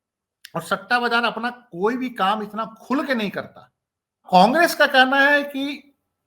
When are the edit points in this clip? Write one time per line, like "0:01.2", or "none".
0:04.2